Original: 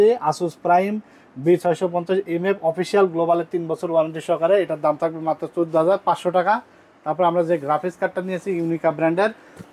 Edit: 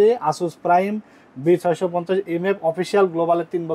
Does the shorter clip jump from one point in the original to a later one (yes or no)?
no